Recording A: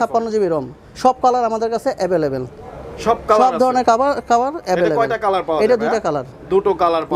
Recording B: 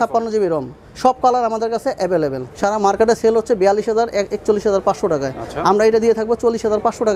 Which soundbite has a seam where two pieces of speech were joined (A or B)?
B